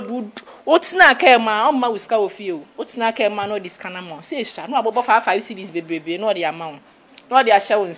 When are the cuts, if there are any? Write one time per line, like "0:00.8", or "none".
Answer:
none

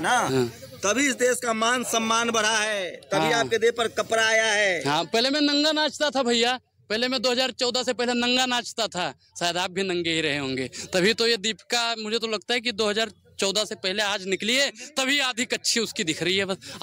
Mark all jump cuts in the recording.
none

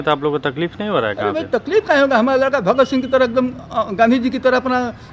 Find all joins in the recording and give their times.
none

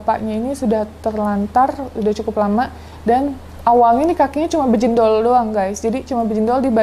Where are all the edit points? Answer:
none

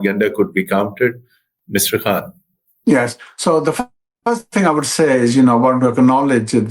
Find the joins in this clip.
none

